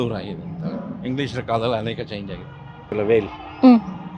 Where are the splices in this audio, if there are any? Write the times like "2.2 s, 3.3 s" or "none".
2.9 s